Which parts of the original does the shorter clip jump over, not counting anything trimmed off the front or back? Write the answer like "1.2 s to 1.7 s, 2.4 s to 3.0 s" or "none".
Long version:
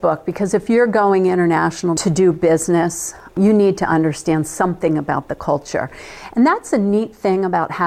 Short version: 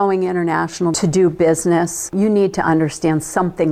3.0 s to 3.2 s